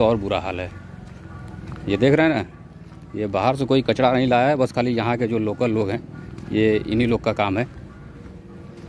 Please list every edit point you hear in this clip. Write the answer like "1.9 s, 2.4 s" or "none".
none